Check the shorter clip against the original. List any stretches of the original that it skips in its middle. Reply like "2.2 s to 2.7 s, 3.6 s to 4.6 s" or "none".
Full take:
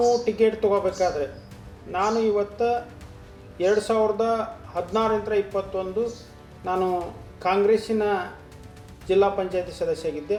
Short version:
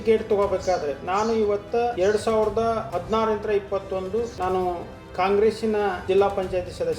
1.3 s to 1.9 s, 2.8 s to 3.6 s, 4.5 s to 4.7 s, 6.2 s to 6.6 s, 8.3 s to 9.0 s